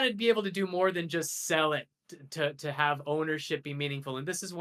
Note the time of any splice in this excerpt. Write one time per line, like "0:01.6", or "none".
none